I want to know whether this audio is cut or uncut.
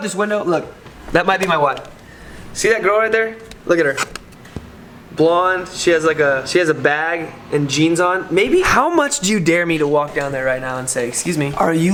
uncut